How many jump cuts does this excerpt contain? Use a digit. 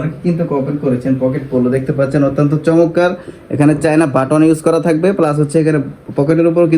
0